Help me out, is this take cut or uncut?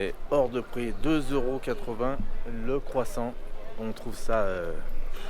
uncut